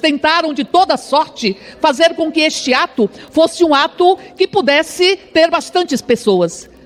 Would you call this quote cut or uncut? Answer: uncut